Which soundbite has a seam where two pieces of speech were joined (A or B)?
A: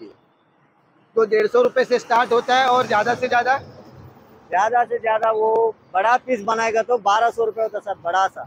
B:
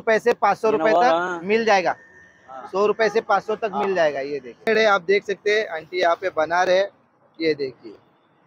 B